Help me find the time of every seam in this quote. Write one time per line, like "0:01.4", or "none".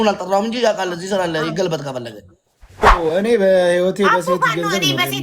0:02.9